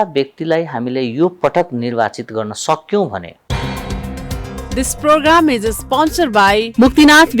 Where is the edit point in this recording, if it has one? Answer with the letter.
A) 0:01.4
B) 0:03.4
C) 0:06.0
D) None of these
B